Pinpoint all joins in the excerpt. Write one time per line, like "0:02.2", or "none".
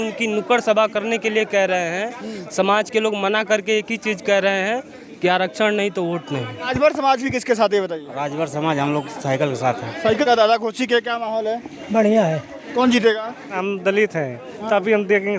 0:06.7
0:10.2
0:13.6